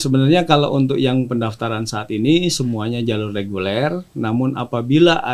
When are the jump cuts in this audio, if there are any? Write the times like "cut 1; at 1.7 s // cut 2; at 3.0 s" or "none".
none